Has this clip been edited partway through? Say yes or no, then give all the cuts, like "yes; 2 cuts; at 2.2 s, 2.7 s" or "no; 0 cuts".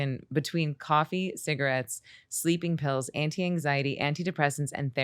no; 0 cuts